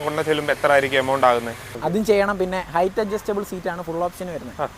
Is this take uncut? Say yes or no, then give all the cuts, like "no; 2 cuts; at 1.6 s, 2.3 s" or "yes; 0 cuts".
no; 1 cut; at 1.7 s